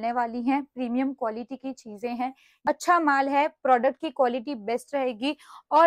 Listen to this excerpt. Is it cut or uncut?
cut